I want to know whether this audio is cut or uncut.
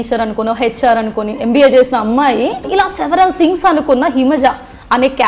cut